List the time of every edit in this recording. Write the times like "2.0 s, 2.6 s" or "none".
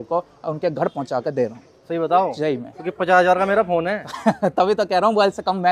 none